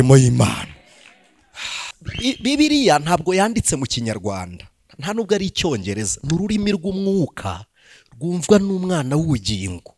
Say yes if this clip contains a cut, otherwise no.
yes